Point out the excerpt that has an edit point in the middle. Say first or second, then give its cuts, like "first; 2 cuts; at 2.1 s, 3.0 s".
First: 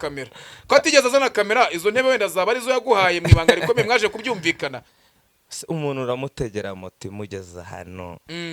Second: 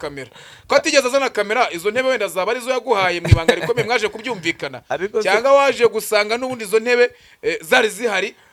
first; 1 cut; at 4.8 s